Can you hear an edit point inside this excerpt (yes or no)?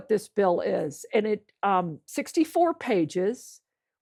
no